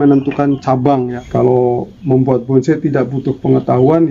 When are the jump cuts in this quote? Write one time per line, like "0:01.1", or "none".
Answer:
0:01.2